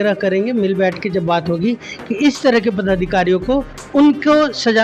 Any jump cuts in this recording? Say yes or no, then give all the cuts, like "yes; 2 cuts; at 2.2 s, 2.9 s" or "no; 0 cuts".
yes; 1 cut; at 3.8 s